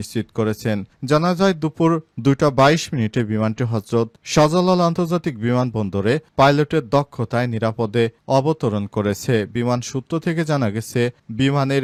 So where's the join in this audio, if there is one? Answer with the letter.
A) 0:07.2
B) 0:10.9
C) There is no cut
C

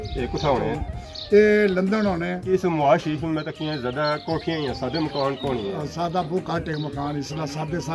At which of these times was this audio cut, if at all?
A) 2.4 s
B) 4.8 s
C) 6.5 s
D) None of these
A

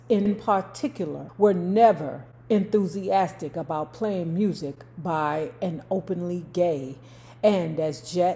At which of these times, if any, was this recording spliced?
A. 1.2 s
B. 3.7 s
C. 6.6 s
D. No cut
A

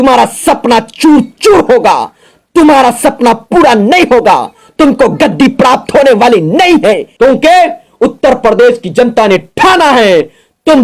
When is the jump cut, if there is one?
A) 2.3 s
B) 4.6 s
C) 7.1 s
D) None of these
C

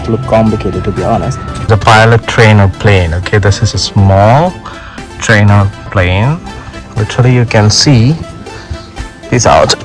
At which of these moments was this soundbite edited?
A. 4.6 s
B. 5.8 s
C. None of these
B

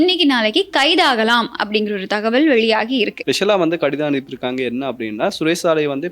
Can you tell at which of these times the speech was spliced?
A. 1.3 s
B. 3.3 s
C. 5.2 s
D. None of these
B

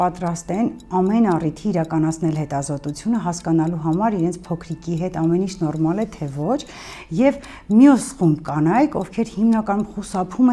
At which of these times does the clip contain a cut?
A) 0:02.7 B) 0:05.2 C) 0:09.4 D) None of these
D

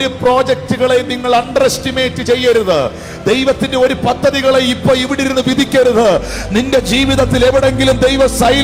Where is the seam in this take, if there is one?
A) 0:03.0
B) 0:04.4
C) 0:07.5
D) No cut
D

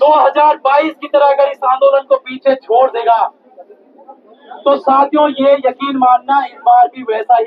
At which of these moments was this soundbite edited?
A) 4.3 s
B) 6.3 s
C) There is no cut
C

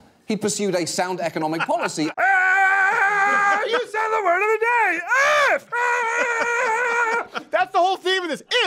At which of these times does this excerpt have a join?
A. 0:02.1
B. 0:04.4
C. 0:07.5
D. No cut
A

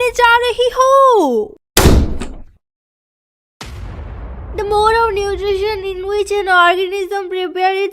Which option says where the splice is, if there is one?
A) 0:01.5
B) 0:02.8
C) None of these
A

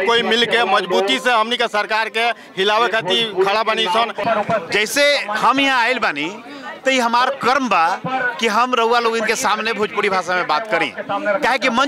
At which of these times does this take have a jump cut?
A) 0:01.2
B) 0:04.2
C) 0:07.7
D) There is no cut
B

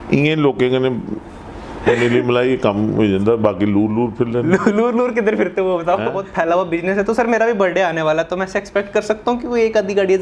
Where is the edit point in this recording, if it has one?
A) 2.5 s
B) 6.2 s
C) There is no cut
B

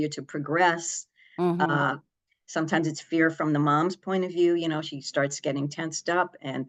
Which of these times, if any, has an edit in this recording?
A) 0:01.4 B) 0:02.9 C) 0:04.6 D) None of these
D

